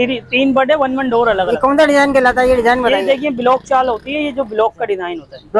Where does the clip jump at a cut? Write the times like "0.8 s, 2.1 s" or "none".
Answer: none